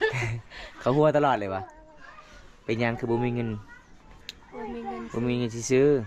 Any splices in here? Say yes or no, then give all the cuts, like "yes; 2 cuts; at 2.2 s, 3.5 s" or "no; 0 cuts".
no; 0 cuts